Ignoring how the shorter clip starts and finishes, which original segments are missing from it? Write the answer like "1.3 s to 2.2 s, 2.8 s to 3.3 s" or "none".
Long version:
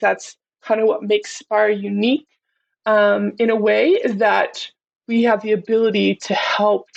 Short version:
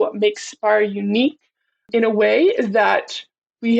2.7 s to 3.3 s

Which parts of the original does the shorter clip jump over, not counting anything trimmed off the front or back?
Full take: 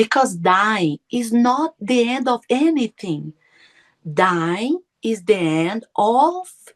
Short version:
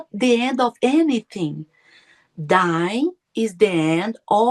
none

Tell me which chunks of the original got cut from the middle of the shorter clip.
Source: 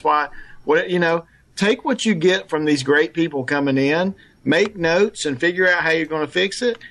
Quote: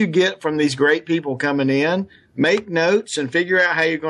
none

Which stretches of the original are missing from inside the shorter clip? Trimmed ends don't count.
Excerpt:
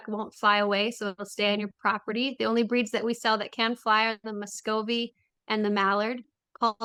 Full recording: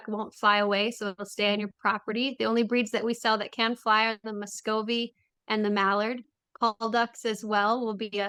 none

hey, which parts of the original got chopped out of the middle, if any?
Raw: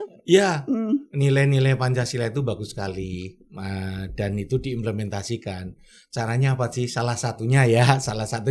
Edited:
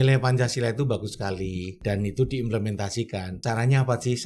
3.3 s to 4.1 s, 5.7 s to 6.0 s

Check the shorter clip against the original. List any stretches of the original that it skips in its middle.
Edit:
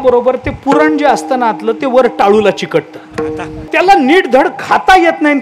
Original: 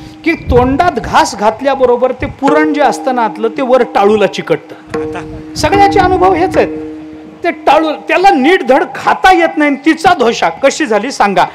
5.4 s to 8.0 s

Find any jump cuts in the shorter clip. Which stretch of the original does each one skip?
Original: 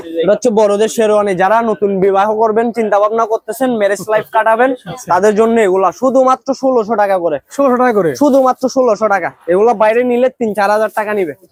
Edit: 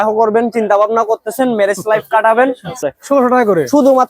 5.0 s to 7.3 s

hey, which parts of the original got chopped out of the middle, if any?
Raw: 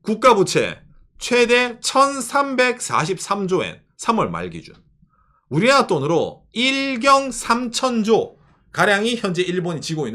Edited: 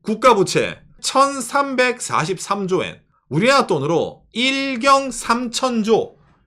1.0 s to 1.8 s, 3.8 s to 5.2 s

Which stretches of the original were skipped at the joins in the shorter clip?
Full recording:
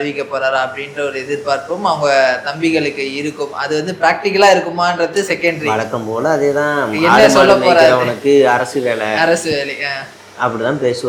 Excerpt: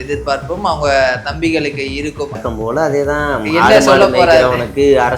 3.6 s to 5.9 s

